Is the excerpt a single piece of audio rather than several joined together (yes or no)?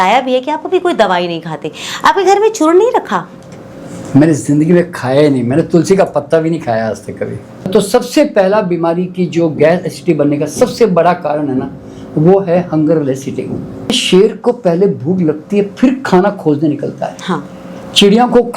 no